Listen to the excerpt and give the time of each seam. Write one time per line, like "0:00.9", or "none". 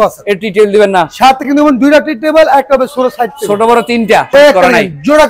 0:04.3